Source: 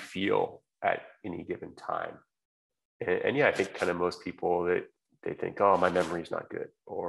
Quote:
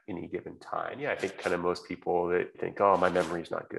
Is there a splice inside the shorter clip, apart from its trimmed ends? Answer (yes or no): yes